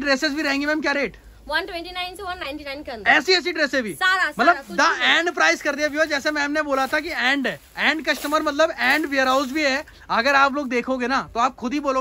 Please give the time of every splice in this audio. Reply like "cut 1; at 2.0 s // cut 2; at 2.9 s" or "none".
none